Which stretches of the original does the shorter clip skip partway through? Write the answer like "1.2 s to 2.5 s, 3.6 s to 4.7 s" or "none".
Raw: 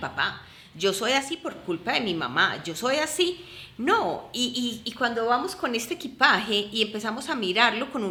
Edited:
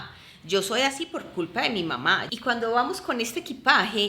2.6 s to 4.8 s